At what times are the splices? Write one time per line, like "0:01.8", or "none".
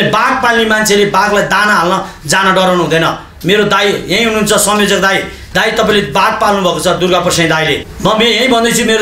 0:07.9